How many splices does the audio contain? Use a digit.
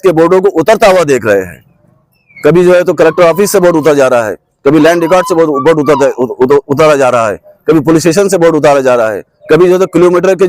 0